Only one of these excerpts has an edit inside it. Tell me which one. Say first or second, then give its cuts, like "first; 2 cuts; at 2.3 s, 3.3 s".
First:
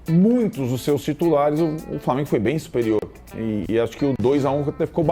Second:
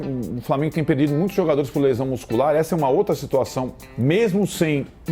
second; 1 cut; at 3.8 s